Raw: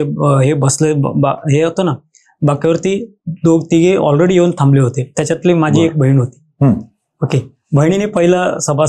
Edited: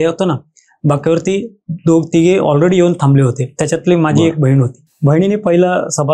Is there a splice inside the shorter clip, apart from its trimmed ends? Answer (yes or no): yes